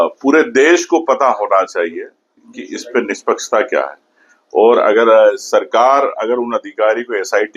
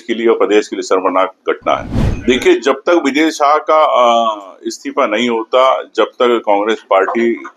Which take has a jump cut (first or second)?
second